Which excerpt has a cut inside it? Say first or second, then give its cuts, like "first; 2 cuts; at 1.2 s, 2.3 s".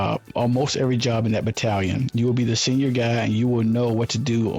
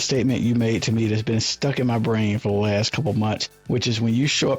second; 1 cut; at 3.5 s